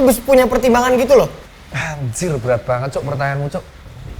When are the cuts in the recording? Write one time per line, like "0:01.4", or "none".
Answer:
0:01.4